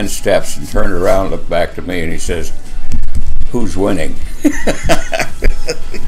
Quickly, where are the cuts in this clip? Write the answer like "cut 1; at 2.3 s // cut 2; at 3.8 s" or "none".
none